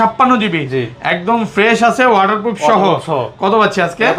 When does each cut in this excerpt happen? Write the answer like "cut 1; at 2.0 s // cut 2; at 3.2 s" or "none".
none